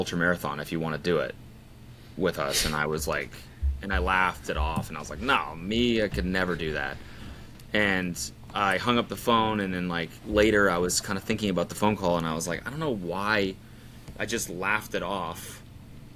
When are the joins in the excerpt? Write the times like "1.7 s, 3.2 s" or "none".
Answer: none